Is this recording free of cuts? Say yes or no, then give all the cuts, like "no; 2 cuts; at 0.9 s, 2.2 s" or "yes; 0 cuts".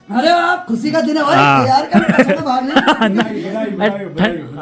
yes; 0 cuts